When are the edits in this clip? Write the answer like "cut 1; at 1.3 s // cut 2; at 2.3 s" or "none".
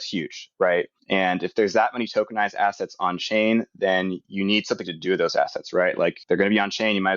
cut 1; at 1.0 s // cut 2; at 6.2 s